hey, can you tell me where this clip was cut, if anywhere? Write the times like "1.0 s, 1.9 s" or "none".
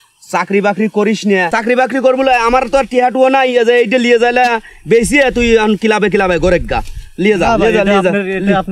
1.5 s

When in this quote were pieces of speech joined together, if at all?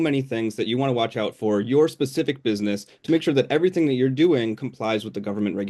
none

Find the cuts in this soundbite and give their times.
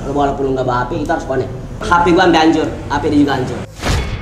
1.8 s

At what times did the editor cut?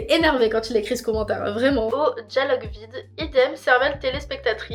none

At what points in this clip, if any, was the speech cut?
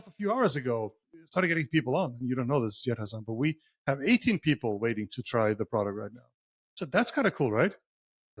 1.1 s

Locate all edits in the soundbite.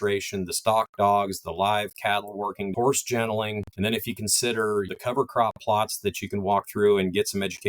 2.7 s, 3.7 s, 4.9 s

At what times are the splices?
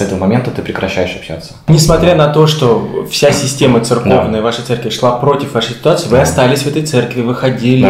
1.6 s

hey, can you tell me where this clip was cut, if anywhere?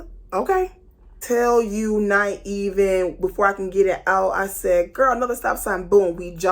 1.2 s

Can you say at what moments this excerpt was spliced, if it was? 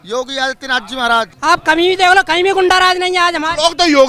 1.3 s

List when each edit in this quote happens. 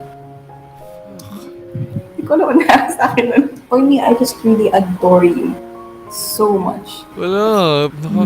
3.6 s, 7.0 s

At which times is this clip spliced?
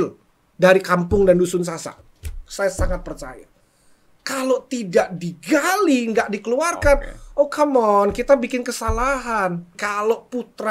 9.8 s

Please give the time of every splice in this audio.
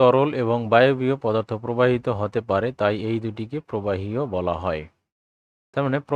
none

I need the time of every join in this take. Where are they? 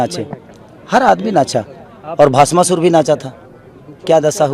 none

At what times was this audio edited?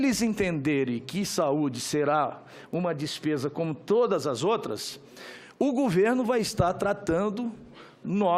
none

